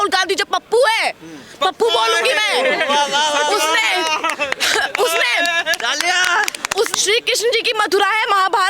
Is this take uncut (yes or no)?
no